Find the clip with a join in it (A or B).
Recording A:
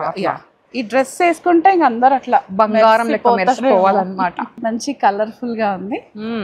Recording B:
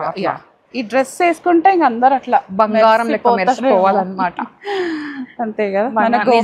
A